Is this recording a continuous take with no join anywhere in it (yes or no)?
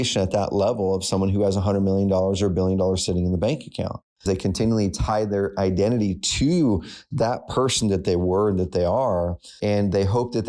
no